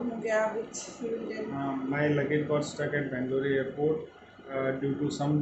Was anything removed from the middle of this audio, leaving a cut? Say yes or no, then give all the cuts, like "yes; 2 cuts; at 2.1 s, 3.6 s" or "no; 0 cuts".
no; 0 cuts